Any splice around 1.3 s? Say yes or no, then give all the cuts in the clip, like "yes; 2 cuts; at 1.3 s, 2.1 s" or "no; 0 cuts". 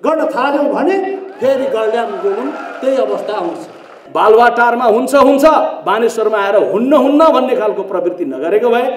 no; 1 cut; at 4.0 s